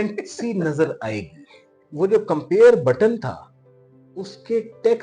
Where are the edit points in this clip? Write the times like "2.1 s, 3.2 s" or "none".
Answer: 1.8 s